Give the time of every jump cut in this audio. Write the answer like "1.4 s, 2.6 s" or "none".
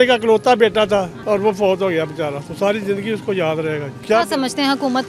1.2 s, 3.9 s